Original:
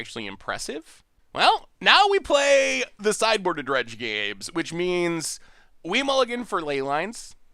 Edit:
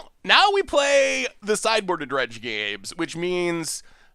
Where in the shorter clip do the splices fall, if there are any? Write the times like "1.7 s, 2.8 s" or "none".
none